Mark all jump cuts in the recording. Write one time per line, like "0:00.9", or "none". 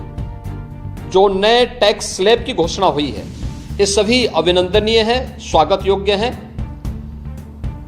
0:06.4

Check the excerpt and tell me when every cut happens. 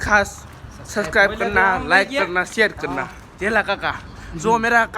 0:03.2

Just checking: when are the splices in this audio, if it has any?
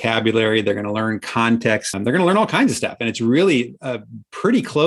0:01.9

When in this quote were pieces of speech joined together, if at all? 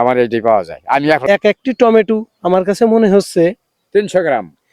0:01.2

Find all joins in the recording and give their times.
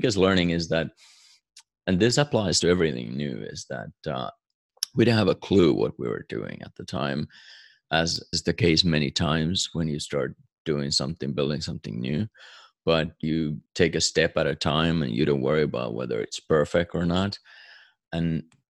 0:04.3

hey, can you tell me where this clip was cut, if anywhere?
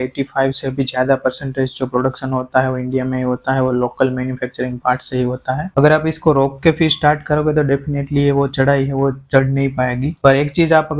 0:05.7
0:10.1

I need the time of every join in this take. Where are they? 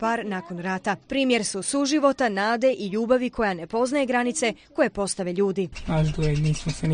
none

